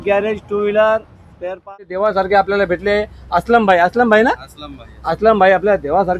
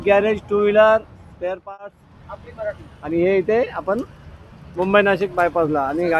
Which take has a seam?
first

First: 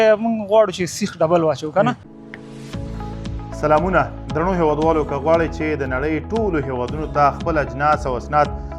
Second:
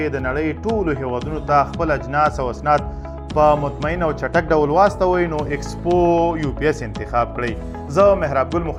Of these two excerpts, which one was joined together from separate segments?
first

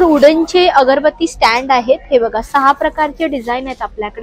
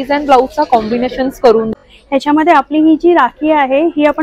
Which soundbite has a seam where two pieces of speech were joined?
second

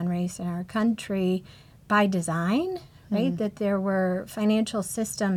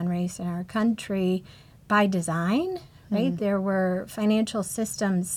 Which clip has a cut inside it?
second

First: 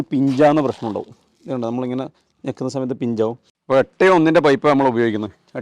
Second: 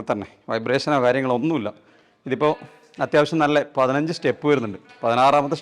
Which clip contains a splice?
first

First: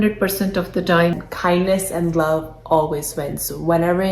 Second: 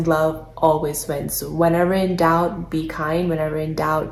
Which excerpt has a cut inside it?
first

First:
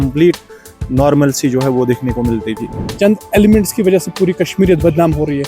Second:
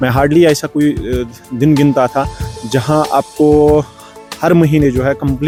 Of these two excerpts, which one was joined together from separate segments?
first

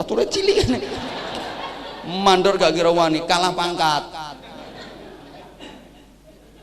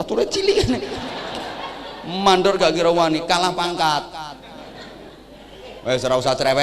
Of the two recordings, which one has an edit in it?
second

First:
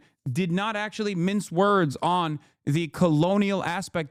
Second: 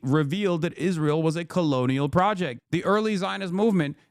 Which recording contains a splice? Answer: second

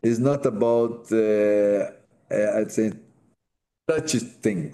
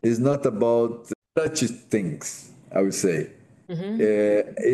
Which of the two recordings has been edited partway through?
second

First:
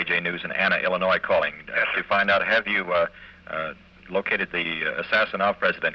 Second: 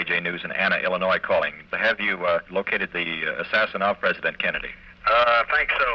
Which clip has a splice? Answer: second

